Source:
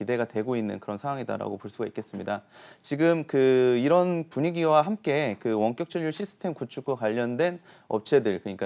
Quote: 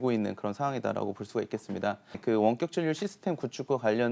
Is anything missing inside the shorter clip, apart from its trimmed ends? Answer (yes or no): yes